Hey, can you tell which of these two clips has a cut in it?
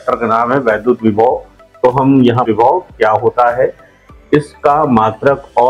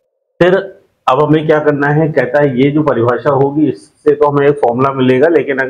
first; 1 cut; at 2.4 s

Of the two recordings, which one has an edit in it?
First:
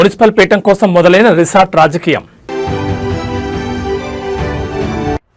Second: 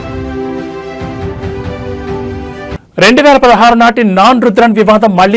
second; 1 cut; at 2.7 s

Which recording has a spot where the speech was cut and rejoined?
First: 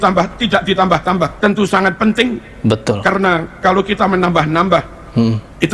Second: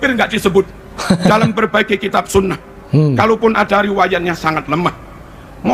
first; 1 cut; at 1.4 s

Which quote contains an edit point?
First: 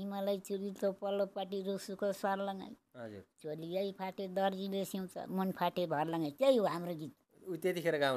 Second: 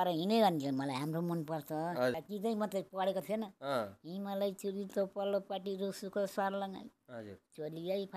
second; 1 cut; at 2.1 s

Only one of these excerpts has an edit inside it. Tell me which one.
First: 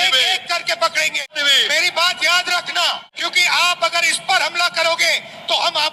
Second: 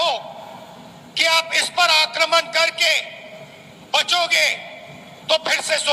first; 2 cuts; at 1.3 s, 3.2 s

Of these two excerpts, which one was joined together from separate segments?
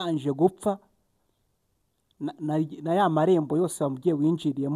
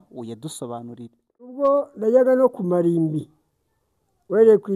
second; 1 cut; at 1.5 s

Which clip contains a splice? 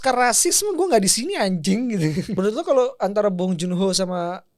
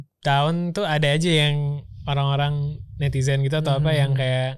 first; 1 cut; at 2.4 s

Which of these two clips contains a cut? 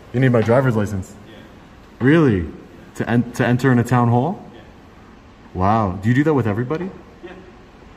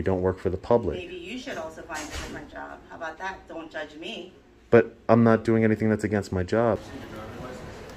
second; 1 cut; at 6.8 s

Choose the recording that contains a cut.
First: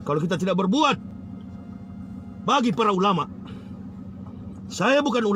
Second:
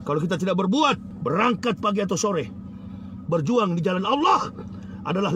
second; 1 cut; at 1.1 s

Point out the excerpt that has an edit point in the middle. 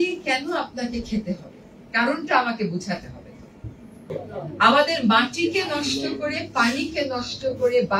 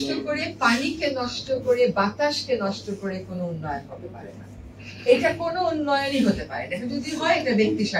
first; 1 cut; at 3.9 s

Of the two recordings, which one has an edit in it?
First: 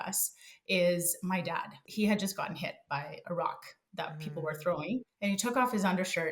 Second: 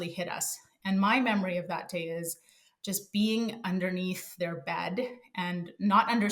first; 2 cuts; at 1.8 s, 5.1 s

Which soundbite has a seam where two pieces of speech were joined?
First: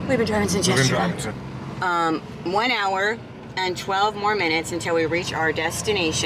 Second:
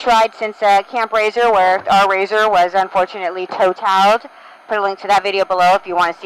first; 1 cut; at 1.3 s

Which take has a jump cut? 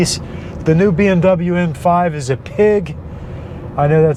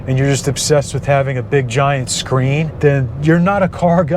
second; 1 cut; at 2.7 s

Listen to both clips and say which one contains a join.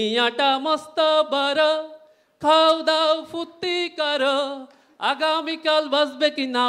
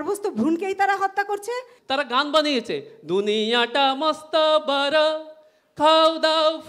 second; 1 cut; at 1.7 s

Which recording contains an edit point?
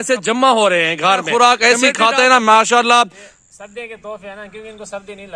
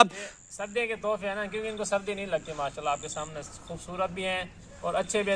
first; 1 cut; at 1.3 s

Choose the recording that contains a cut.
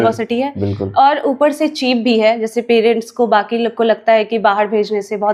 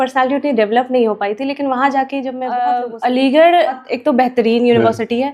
second; 2 cuts; at 2.8 s, 3.9 s

